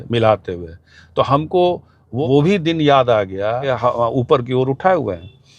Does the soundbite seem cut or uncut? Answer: cut